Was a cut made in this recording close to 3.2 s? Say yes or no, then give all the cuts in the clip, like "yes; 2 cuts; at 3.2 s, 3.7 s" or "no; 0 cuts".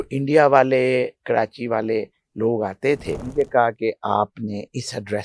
yes; 1 cut; at 3.2 s